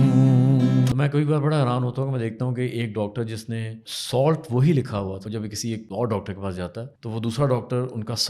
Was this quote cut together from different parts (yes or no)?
yes